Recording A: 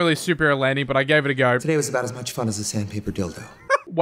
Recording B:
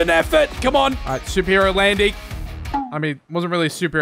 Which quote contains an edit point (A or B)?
A